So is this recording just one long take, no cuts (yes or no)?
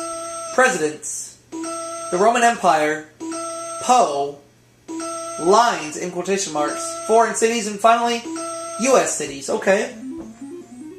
no